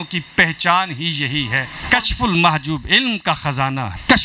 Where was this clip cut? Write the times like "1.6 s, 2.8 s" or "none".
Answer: 1.7 s